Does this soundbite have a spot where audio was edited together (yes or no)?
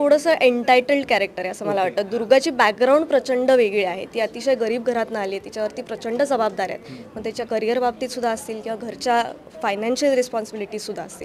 no